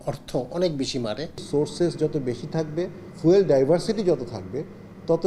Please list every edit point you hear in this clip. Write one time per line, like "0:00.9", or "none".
0:01.4
0:03.0